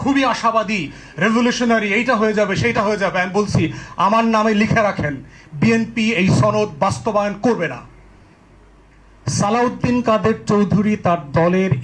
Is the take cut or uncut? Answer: cut